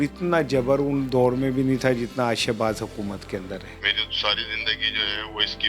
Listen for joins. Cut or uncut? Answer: cut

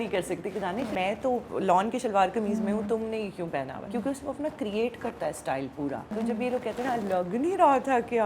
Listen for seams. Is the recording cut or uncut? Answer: cut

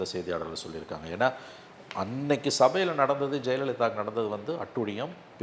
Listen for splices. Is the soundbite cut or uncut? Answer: uncut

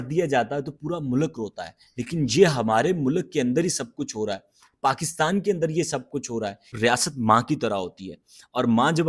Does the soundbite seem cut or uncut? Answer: cut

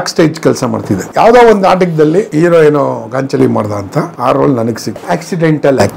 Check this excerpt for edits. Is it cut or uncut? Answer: cut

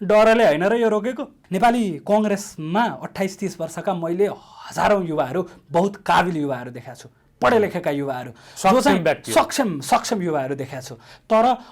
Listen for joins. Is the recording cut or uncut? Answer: cut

